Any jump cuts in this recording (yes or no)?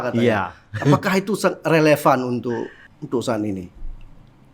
yes